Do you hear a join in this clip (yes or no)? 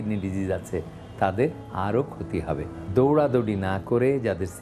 yes